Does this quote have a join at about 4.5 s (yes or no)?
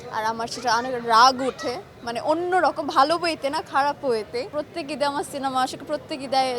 yes